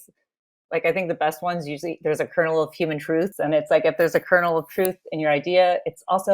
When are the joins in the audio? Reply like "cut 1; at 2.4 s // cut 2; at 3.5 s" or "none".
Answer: cut 1; at 3.3 s